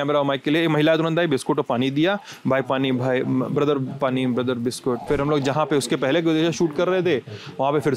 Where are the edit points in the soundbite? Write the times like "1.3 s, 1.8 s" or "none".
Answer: 5.0 s